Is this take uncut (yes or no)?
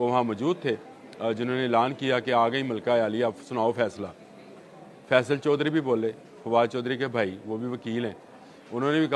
yes